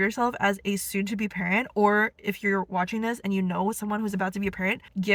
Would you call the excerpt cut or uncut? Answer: uncut